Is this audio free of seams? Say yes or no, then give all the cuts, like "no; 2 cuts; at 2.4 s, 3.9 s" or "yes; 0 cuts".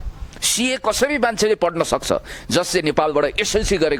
yes; 0 cuts